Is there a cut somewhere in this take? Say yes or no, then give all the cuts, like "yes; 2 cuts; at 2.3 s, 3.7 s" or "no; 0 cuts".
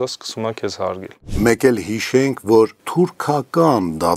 yes; 2 cuts; at 1.2 s, 2.8 s